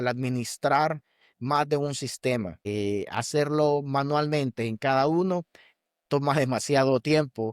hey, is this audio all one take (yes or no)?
no